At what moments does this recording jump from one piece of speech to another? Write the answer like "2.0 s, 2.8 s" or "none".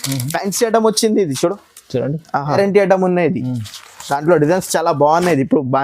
2.5 s